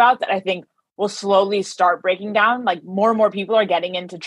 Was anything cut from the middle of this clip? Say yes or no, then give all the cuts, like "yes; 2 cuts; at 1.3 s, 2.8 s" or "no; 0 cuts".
no; 0 cuts